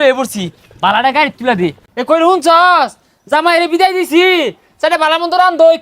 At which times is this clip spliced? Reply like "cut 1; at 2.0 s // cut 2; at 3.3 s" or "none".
cut 1; at 1.8 s